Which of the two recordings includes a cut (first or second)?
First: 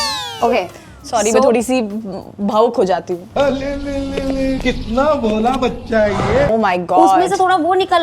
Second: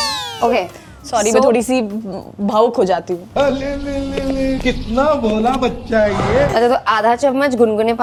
first